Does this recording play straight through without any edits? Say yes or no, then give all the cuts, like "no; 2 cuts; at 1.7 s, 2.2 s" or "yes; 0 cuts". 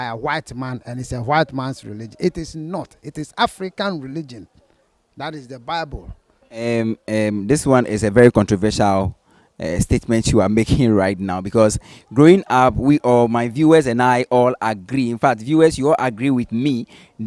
yes; 0 cuts